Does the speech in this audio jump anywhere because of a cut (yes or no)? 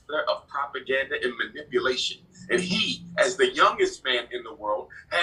no